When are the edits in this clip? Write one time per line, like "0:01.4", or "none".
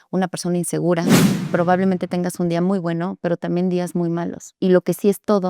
0:01.2
0:04.5

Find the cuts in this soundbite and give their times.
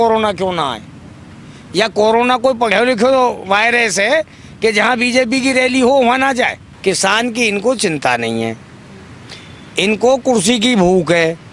0:06.7

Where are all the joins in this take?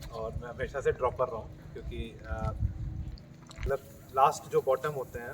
0:03.7

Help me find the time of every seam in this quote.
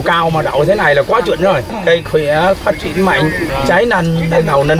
0:01.7
0:03.5

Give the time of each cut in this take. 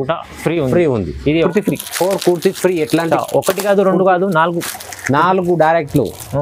0:01.5

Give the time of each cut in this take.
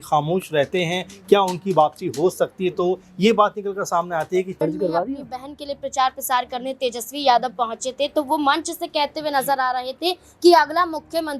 0:04.6

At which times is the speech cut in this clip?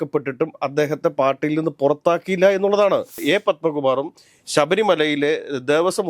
0:03.2

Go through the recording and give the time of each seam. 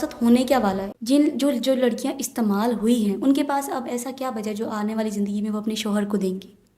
0:00.9

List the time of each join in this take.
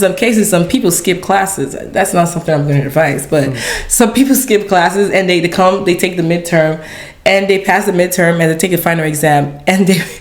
none

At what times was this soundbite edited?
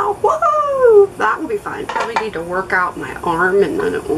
0:01.9

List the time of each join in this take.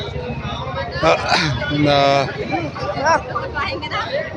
none

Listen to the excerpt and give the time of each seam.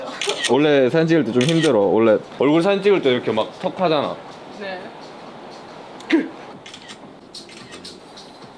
0:02.3
0:06.5

